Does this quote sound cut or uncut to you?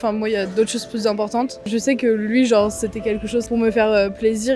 cut